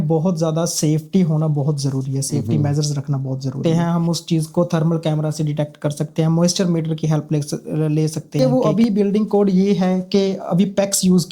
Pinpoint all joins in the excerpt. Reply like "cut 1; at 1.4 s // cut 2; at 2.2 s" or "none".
cut 1; at 3.6 s // cut 2; at 8.4 s